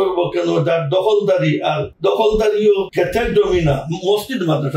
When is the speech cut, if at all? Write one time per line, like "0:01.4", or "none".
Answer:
0:01.9
0:02.9

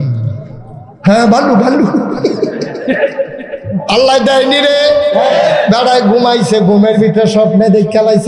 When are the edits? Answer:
0:03.8

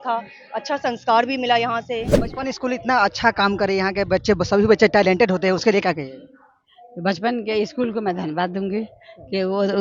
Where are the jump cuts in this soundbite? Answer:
0:02.1

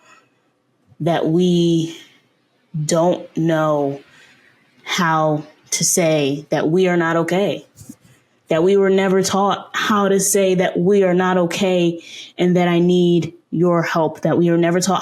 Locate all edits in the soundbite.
none

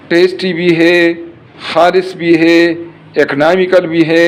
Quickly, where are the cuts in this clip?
none

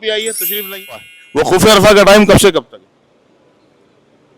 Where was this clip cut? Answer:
0:01.2

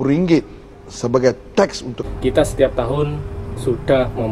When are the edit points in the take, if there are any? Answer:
0:01.9

